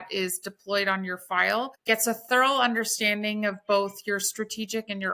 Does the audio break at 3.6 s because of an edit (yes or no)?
no